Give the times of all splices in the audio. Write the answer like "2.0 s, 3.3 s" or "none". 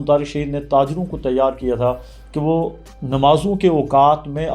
none